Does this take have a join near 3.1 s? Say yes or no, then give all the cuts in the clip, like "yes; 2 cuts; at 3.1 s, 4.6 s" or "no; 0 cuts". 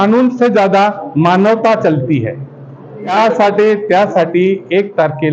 yes; 1 cut; at 3.1 s